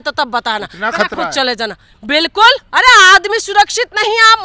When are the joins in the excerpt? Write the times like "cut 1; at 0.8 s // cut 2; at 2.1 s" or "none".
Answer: cut 1; at 2.7 s